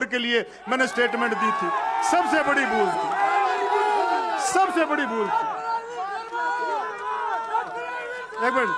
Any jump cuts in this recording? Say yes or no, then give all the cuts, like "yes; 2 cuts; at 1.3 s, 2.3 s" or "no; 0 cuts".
no; 0 cuts